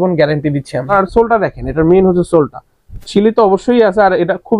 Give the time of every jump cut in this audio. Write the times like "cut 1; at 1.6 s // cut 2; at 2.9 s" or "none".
cut 1; at 0.9 s